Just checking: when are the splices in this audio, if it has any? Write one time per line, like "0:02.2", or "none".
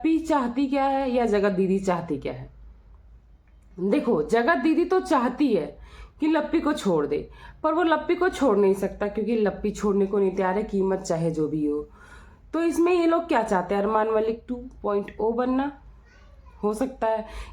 none